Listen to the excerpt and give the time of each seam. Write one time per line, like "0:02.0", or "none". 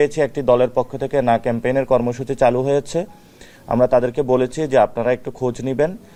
none